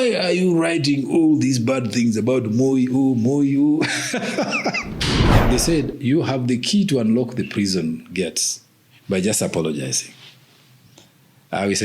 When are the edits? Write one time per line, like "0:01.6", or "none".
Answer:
0:05.3

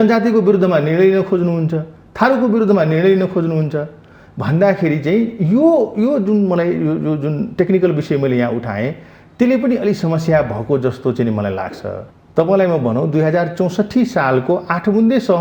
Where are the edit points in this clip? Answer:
0:12.0

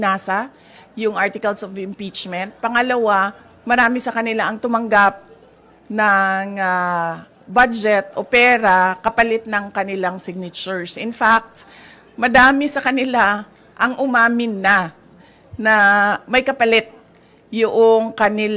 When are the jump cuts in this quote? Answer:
none

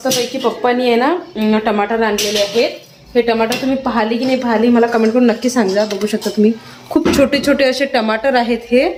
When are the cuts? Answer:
none

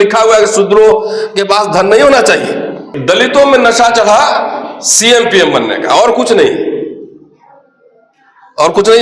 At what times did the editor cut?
0:02.9

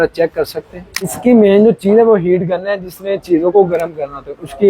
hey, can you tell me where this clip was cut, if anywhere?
0:01.1

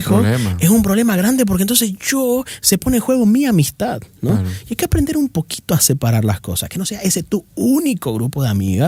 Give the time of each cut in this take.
none

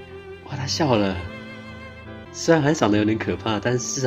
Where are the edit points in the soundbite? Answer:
none

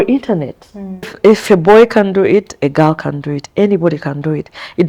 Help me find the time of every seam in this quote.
0:01.1

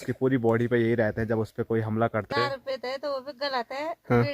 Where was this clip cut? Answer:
0:02.3

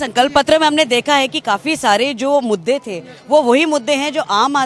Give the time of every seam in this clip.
none

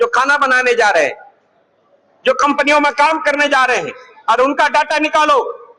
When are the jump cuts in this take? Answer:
none

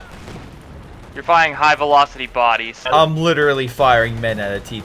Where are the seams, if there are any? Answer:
0:02.8

